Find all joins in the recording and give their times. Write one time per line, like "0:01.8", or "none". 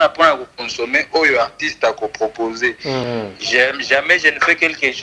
0:03.1